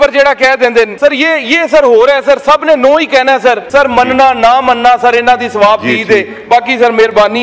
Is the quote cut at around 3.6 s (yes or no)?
yes